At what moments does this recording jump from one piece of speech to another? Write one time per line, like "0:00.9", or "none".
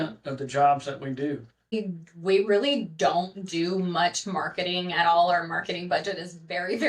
0:01.7

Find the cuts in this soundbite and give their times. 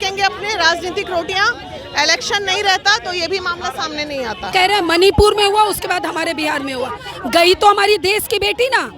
0:04.5

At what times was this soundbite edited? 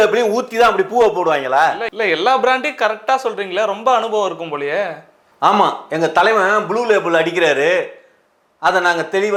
none

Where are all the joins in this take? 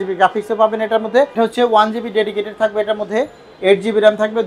0:01.3

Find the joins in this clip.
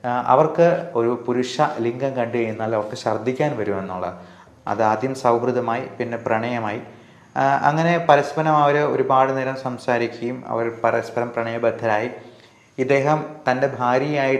0:00.9
0:04.3

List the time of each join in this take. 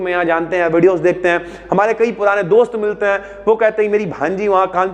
none

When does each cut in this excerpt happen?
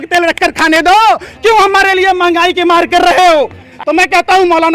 0:03.7

